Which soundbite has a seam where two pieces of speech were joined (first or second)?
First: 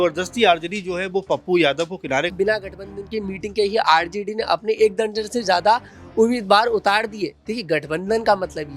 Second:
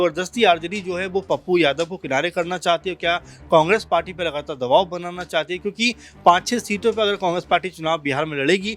first